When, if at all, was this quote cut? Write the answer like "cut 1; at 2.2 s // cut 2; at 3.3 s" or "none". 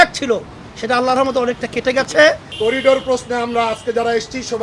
cut 1; at 2.5 s